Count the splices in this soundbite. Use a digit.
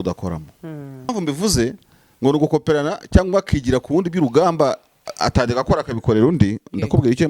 1